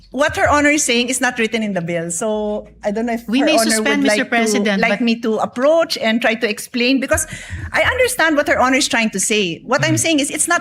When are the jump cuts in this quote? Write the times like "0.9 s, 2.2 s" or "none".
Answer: none